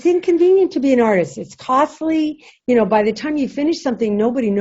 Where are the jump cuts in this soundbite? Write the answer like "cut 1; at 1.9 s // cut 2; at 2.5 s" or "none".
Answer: cut 1; at 2.5 s